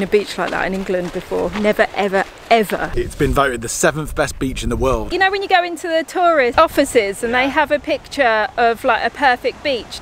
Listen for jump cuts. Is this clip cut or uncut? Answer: cut